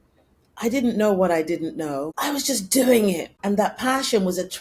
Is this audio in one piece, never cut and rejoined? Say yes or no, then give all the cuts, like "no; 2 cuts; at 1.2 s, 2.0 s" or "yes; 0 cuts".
no; 2 cuts; at 2.1 s, 3.3 s